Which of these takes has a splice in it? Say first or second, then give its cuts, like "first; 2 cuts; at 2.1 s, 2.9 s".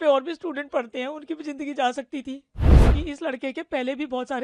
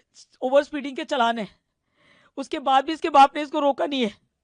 first; 1 cut; at 2.8 s